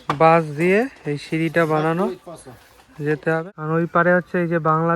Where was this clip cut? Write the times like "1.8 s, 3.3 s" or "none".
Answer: 3.7 s